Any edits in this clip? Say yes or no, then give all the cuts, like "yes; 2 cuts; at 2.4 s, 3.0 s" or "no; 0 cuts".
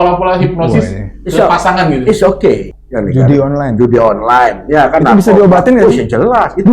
yes; 1 cut; at 2.7 s